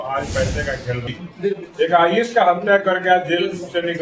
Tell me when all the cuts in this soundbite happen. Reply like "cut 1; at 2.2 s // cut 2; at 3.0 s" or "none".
cut 1; at 1.1 s